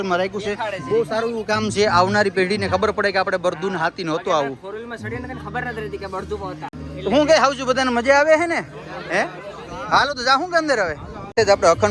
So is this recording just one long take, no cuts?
yes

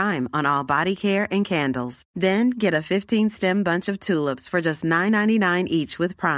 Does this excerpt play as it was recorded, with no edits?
yes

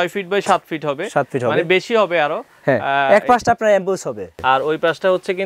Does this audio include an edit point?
yes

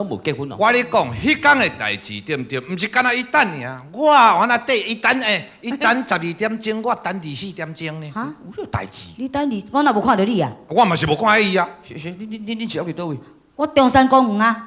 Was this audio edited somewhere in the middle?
no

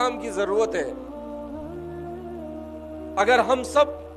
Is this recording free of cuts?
no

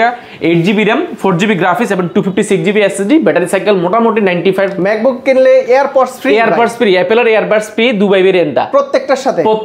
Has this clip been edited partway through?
yes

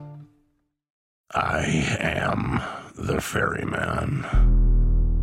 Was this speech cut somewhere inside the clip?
yes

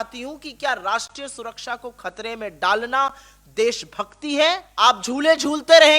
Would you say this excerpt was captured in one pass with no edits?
no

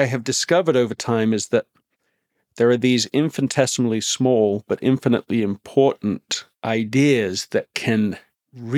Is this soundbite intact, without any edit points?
yes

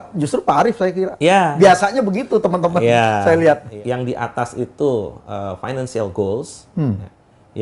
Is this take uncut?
no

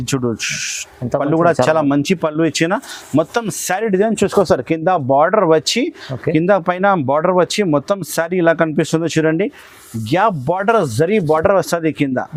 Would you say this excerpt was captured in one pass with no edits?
yes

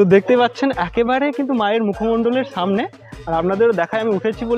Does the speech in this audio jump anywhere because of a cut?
no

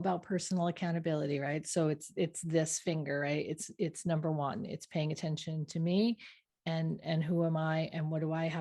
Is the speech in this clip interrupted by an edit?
no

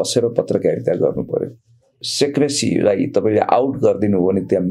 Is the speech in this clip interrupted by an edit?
yes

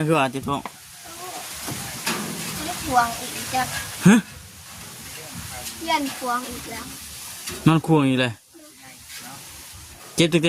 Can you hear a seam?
no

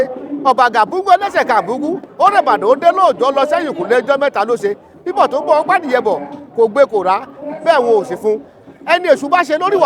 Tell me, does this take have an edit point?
no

